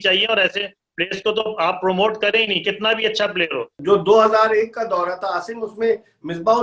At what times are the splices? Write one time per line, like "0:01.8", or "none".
0:03.7